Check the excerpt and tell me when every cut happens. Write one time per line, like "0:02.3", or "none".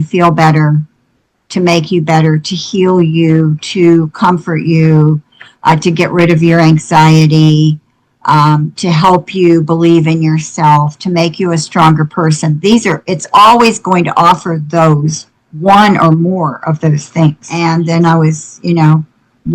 0:17.5